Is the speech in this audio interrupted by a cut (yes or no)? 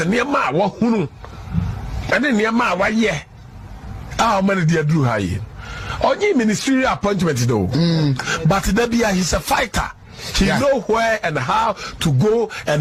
no